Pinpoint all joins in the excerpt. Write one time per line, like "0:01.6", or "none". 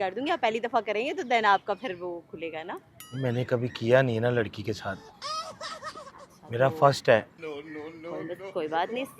0:03.0